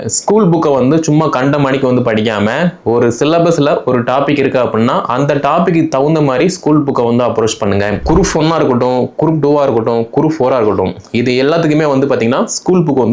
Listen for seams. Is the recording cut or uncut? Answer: cut